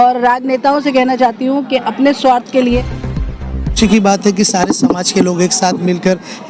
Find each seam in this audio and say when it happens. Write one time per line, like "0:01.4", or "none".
0:03.3